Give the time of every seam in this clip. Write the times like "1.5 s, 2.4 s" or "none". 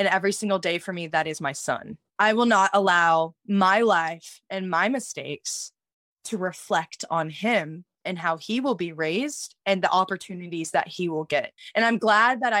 2.0 s, 11.6 s